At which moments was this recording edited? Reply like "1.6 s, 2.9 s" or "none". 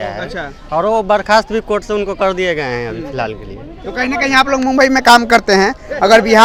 none